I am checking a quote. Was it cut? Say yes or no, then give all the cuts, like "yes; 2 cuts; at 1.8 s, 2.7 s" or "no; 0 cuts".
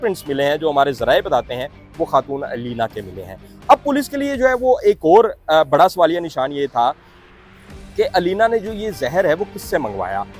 no; 0 cuts